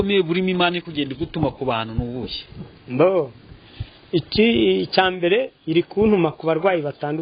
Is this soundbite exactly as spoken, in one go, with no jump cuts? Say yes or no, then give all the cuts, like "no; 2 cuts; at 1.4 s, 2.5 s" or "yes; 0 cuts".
yes; 0 cuts